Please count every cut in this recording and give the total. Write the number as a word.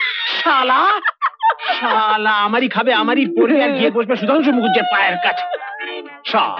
zero